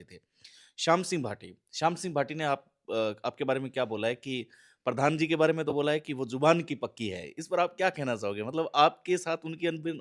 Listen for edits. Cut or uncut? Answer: uncut